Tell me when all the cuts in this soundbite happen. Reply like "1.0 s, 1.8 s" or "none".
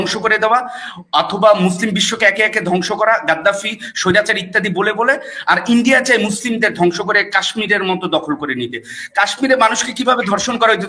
none